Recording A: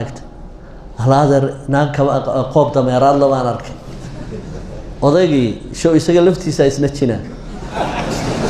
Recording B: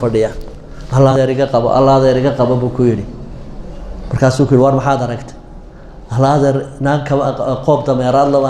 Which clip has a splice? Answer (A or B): B